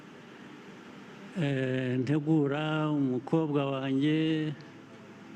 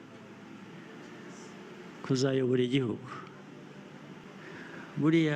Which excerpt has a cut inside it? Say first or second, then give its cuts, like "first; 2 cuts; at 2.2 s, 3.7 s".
second; 1 cut; at 4.2 s